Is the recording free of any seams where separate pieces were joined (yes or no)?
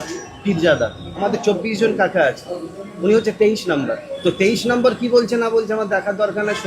no